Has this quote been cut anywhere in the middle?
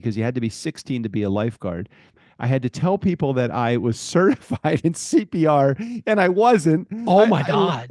yes; 1 cut; at 2.2 s

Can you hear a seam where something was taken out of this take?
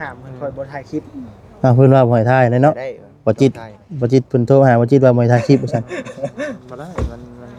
no; 0 cuts

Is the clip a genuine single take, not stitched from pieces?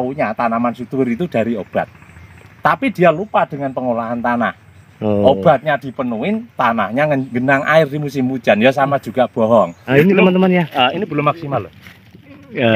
no; 1 cut; at 9.8 s

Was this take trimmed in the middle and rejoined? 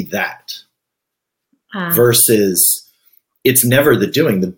no; 0 cuts

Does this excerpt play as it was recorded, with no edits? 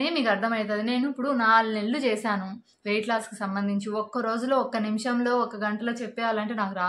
yes; 0 cuts

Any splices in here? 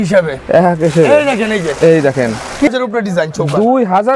yes; 1 cut; at 2.7 s

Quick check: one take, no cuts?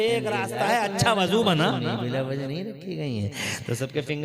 no; 1 cut; at 1.9 s

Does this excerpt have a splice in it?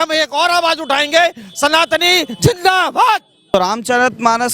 yes; 1 cut; at 3.5 s

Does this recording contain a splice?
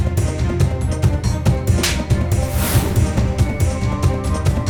no; 0 cuts

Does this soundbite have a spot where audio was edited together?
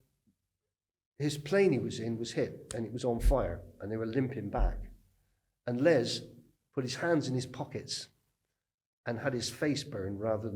no; 0 cuts

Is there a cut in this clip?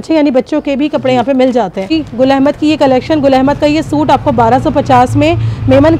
yes; 1 cut; at 1.9 s

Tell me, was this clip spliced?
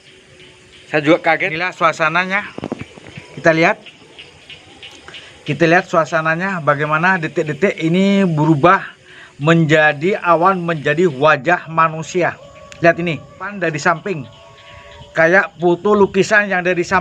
yes; 2 cuts; at 1.7 s, 13.5 s

